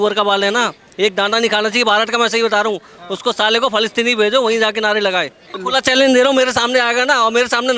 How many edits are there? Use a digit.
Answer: 1